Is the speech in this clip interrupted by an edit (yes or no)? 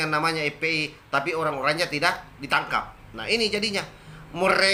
no